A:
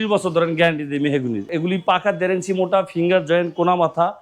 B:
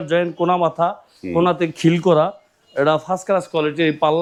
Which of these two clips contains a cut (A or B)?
A